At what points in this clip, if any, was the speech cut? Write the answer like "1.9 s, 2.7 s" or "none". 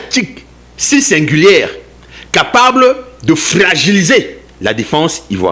none

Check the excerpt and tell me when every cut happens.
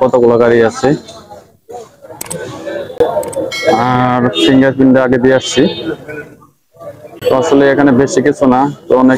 none

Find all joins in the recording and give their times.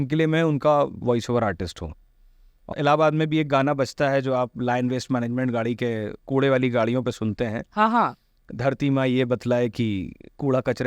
2.5 s

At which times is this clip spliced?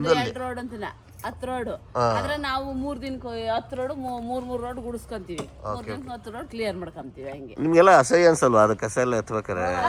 7.5 s

